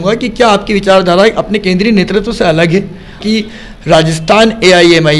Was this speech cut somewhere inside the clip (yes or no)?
yes